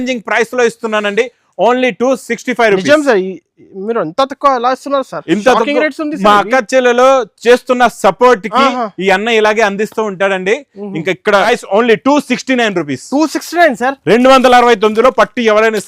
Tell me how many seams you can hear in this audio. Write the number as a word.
one